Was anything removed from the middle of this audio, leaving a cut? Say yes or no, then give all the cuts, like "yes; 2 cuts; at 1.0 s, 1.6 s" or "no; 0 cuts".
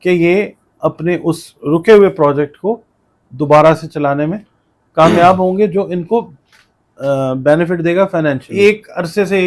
yes; 1 cut; at 8.5 s